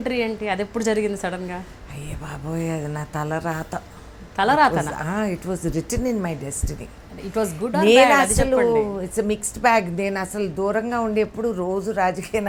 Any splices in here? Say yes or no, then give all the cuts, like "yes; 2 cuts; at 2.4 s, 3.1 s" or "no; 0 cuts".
no; 0 cuts